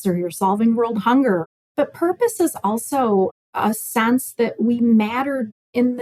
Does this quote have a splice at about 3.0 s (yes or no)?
no